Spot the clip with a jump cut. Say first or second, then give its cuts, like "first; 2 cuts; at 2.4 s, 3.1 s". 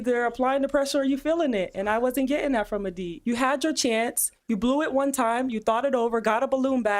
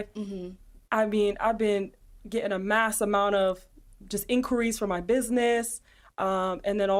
first; 1 cut; at 3.1 s